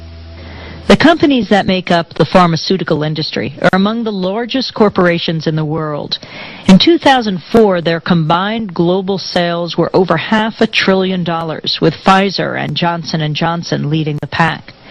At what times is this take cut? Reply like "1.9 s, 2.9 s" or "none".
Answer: 10.8 s